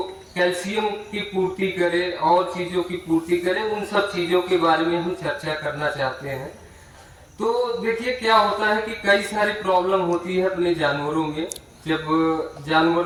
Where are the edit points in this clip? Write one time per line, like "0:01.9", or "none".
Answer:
none